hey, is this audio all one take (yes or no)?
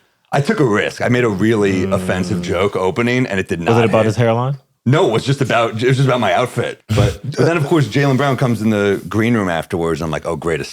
no